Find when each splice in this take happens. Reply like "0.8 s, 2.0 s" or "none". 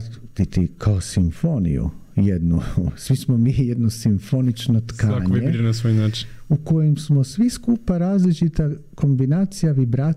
none